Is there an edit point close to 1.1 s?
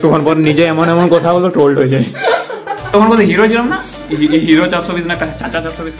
no; 1 cut; at 2.9 s

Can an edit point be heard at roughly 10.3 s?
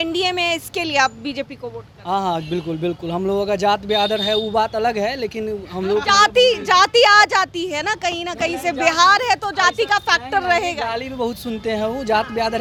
no; 0 cuts

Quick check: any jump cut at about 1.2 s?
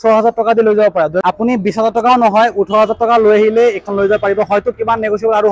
yes; 1 cut; at 1.2 s

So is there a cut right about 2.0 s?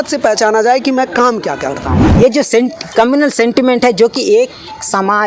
yes; 1 cut; at 2.0 s

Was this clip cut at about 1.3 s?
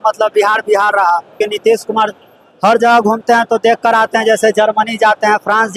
yes; 1 cut; at 1.3 s

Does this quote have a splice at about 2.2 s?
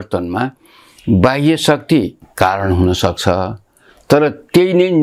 yes; 1 cut; at 2.2 s

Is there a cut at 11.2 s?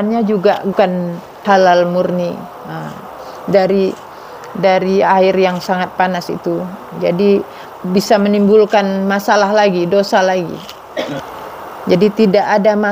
yes; 2 cuts; at 0.7 s, 11.2 s

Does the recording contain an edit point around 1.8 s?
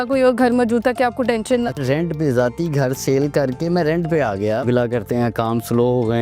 yes; 2 cuts; at 1.8 s, 4.6 s

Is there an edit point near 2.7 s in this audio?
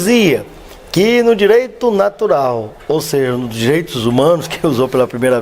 no; 1 cut; at 4.2 s

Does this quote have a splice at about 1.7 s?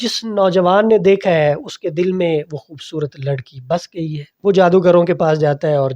no; 1 cut; at 4.3 s

